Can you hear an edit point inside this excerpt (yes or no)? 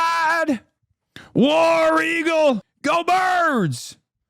yes